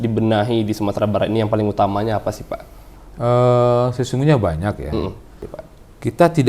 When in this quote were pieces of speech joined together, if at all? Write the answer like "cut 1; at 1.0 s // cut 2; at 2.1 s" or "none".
cut 1; at 5.5 s